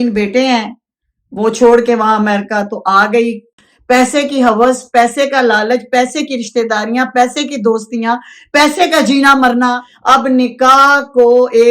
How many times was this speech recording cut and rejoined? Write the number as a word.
two